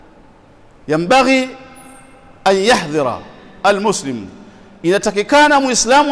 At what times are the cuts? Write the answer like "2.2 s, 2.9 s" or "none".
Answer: none